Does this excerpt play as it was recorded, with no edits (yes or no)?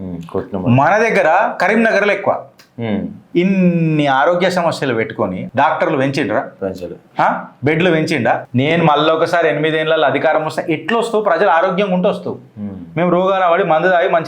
no